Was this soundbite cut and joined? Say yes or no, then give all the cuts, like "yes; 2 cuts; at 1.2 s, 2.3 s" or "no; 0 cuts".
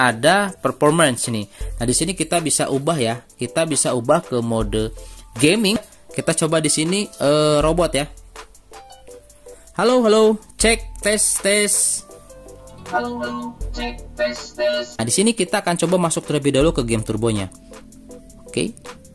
yes; 2 cuts; at 5.8 s, 15.0 s